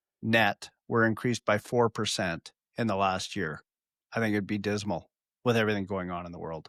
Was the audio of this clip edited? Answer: no; 0 cuts

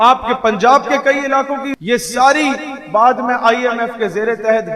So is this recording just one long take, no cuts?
no; 1 cut; at 1.7 s

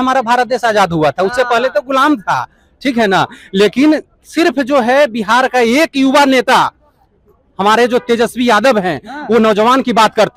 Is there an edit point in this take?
no; 0 cuts

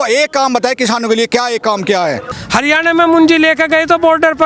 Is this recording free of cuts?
no; 1 cut; at 2.3 s

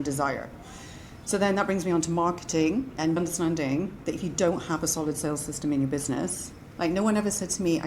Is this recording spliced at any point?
yes; 1 cut; at 3.2 s

